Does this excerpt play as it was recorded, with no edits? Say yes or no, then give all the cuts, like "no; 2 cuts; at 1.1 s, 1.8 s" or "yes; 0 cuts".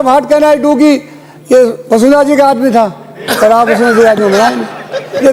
yes; 0 cuts